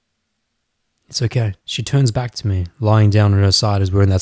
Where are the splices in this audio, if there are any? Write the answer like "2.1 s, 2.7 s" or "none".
1.6 s